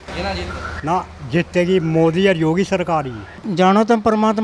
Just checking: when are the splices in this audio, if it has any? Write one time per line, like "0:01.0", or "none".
0:03.4